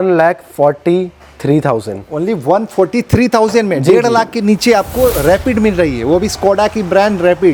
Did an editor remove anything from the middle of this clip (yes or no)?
no